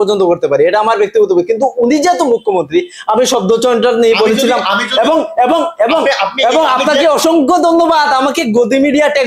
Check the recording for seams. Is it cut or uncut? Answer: uncut